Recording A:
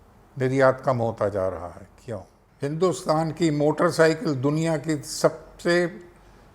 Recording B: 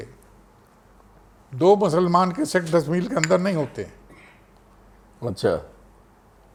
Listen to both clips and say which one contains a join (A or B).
A